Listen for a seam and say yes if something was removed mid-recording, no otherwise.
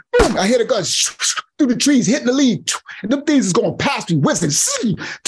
no